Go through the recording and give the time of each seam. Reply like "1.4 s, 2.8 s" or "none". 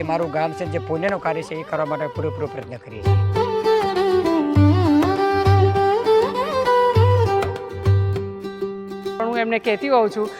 2.7 s, 9.1 s